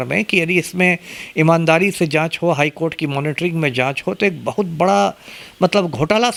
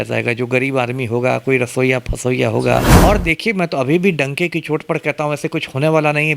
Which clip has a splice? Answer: second; 1 cut; at 2.9 s

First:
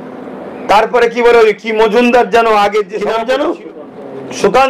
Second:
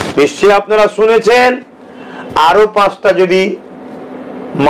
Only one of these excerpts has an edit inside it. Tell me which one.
first; 1 cut; at 3.0 s

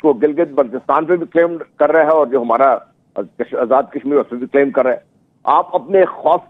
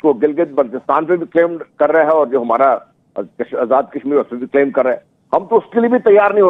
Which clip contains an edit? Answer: first; 1 cut; at 5.1 s

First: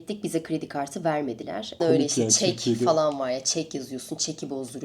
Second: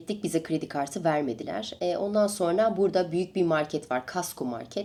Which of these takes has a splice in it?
first; 1 cut; at 1.8 s

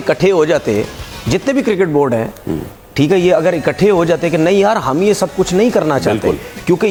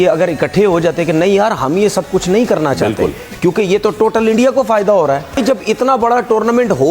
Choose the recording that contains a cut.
second; 1 cut; at 5.4 s

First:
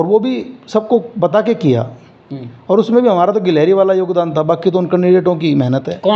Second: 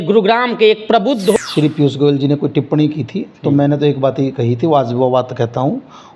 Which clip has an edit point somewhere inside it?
second; 1 cut; at 1.4 s

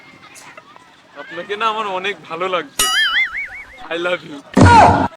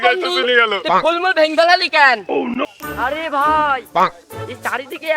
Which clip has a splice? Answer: second; 1 cut; at 2.6 s

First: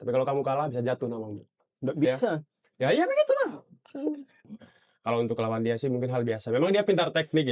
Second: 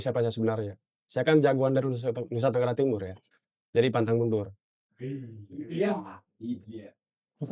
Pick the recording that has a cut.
first; 1 cut; at 4.3 s

